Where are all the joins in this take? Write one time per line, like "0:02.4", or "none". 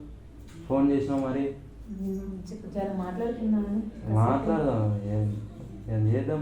none